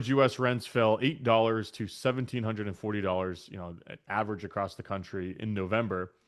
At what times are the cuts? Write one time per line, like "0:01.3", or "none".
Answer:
none